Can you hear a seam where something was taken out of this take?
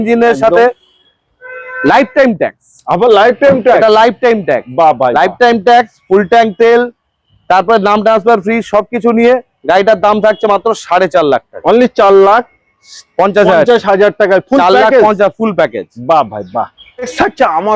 no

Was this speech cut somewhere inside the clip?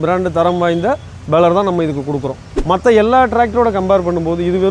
yes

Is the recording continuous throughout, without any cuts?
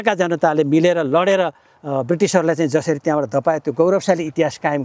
yes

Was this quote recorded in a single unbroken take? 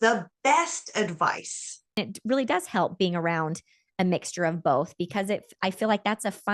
no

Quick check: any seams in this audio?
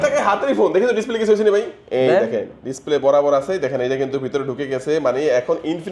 no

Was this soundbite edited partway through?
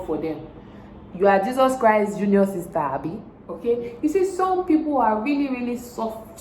yes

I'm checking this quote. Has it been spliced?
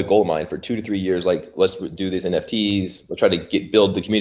no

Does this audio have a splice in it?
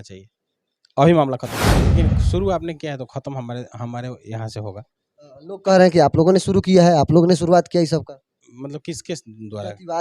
yes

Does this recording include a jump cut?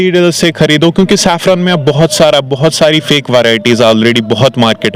no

